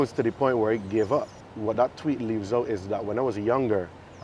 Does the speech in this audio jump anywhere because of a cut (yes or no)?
yes